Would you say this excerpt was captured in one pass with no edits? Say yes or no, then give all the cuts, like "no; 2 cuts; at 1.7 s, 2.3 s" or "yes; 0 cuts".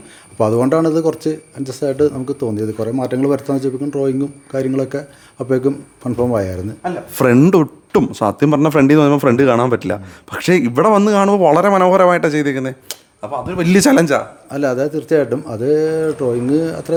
yes; 0 cuts